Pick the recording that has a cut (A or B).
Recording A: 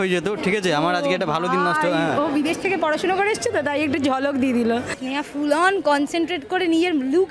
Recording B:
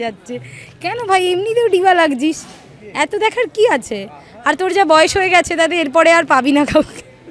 A